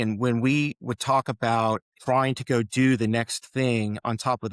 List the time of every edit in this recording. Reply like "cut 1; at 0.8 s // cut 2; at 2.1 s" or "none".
cut 1; at 1.9 s